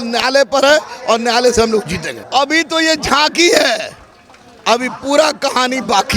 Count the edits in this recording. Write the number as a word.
one